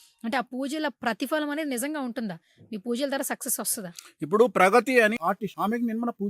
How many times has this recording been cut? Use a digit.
1